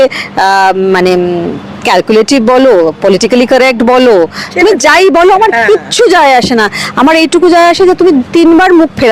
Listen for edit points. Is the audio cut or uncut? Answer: uncut